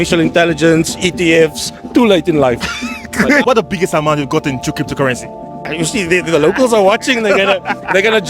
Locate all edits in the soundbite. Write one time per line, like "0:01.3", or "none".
0:03.4